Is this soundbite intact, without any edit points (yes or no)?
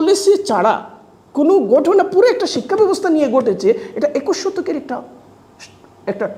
yes